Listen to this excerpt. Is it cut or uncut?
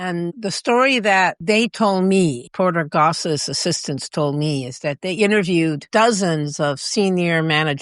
cut